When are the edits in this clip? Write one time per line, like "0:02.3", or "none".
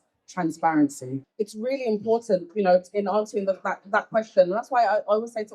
0:01.2

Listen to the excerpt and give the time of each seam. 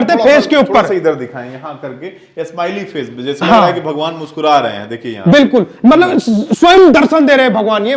none

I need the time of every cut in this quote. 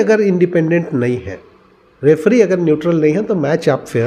none

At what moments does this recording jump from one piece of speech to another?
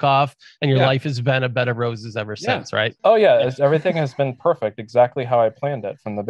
0:02.9

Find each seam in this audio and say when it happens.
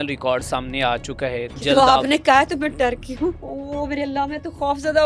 0:01.6
0:03.5

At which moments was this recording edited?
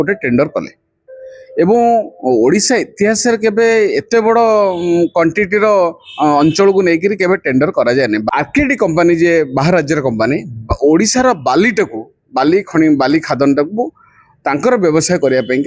0:08.3

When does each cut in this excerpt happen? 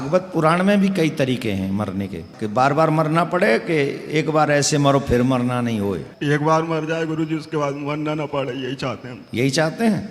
0:02.3
0:06.1

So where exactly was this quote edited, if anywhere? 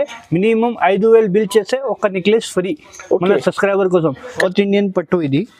0:04.4

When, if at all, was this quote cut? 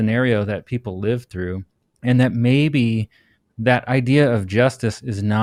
none

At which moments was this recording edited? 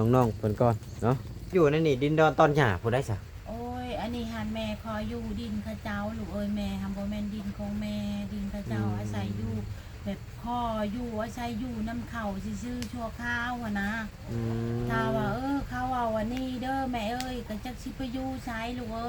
0:01.5

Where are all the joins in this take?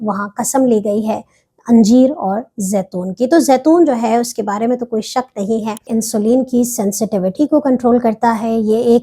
0:05.8

